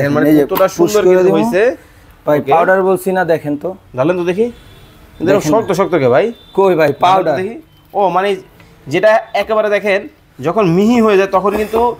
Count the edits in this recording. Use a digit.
0